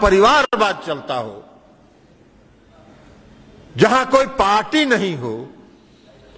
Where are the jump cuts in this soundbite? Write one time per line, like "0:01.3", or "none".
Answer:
none